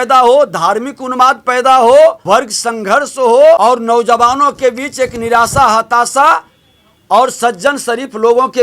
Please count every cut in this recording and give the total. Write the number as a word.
two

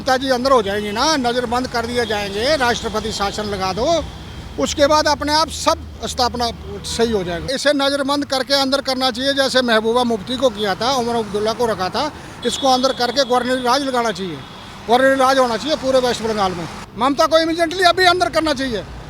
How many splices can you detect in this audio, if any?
three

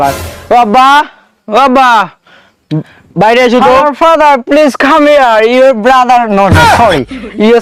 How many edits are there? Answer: zero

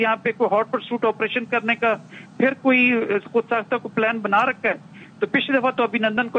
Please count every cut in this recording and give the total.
zero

